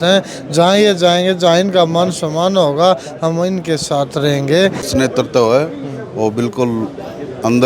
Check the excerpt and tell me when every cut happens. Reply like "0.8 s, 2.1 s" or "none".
4.9 s